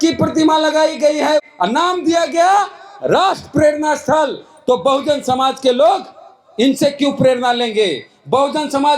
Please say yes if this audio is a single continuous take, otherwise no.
no